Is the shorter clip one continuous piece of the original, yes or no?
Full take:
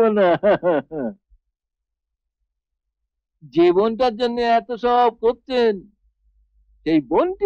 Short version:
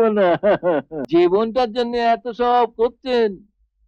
no